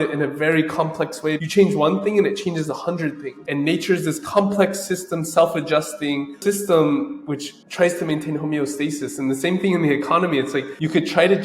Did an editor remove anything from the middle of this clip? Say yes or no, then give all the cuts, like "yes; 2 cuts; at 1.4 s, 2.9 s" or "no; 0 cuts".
yes; 1 cut; at 1.4 s